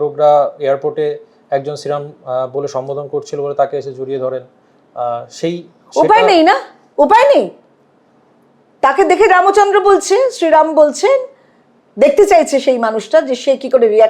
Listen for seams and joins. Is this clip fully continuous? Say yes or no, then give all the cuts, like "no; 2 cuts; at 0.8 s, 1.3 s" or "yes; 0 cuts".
yes; 0 cuts